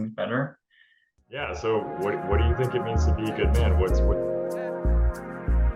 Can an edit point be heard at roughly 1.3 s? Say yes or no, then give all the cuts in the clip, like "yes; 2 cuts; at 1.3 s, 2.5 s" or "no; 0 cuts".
yes; 1 cut; at 1.3 s